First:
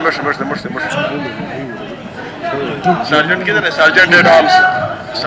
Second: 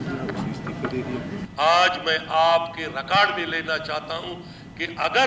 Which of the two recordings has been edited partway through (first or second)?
second